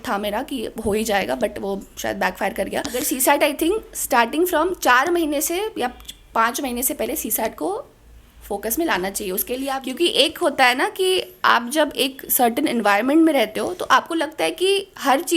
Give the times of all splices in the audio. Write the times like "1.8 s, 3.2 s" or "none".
3.0 s, 9.8 s

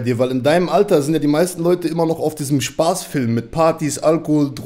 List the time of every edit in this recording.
none

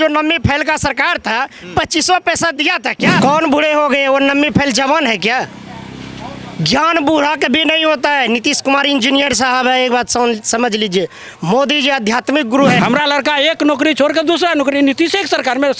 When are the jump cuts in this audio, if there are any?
3.2 s, 12.8 s

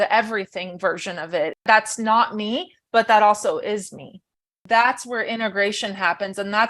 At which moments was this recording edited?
1.6 s, 4.5 s

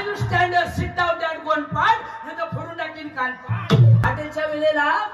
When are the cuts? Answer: 4.0 s

